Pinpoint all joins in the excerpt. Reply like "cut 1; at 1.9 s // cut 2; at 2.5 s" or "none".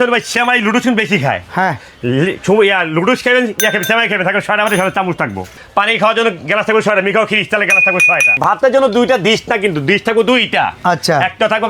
cut 1; at 5.5 s // cut 2; at 8.4 s